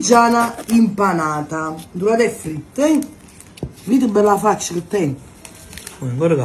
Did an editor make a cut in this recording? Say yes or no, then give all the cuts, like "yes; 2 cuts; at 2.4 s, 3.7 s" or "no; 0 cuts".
no; 0 cuts